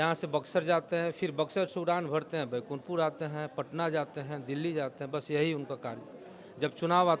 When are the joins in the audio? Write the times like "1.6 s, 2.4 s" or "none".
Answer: none